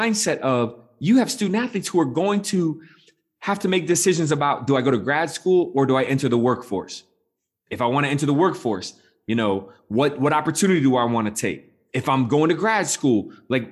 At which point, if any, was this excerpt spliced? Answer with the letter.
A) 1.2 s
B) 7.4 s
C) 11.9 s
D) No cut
D